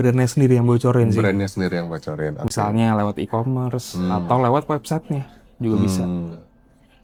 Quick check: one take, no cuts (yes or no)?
yes